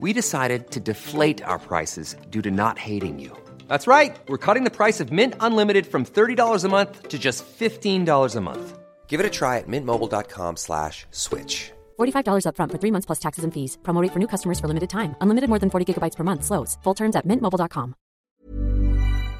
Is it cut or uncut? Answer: cut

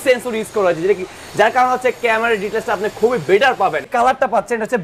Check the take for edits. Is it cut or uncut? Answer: cut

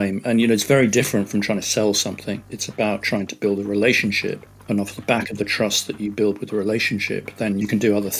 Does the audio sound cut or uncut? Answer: uncut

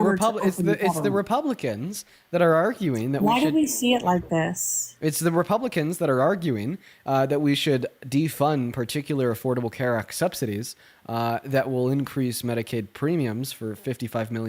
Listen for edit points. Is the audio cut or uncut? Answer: uncut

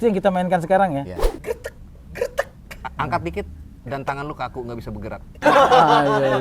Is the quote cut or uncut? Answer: cut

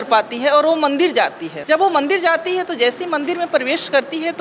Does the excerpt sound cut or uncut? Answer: cut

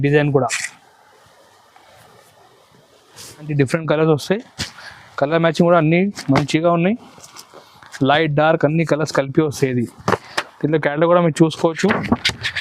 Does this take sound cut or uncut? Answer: cut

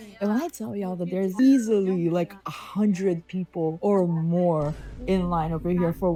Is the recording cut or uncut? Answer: uncut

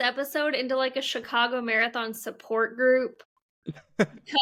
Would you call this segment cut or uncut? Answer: uncut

